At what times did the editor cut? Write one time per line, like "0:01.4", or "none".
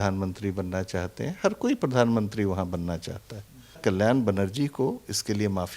0:03.8